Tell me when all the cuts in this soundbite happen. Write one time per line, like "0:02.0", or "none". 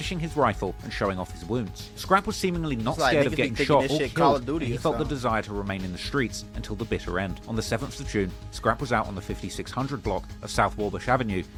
none